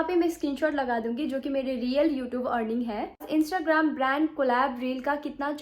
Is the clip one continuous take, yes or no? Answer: no